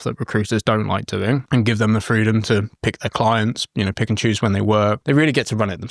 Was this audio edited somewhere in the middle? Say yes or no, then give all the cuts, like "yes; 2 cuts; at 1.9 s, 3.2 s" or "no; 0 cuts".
yes; 2 cuts; at 1.4 s, 5.0 s